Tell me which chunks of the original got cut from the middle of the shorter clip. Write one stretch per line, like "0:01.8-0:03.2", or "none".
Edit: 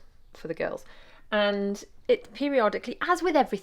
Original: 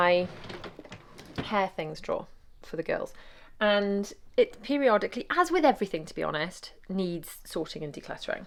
none